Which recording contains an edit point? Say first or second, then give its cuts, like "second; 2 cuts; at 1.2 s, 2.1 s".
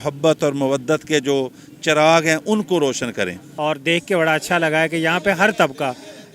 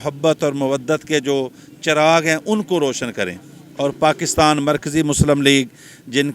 first; 1 cut; at 3.4 s